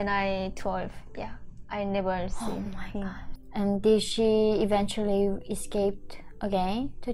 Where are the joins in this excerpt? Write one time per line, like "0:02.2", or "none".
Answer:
0:03.2